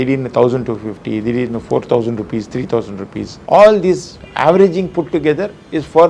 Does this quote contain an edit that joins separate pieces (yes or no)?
yes